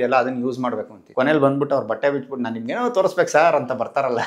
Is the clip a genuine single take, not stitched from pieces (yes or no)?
no